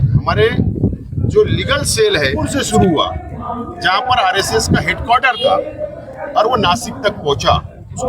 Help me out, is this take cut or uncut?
cut